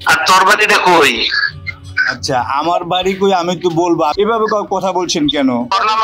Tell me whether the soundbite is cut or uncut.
uncut